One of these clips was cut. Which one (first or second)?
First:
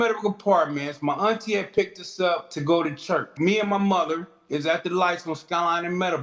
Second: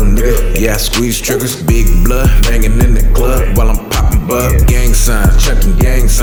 first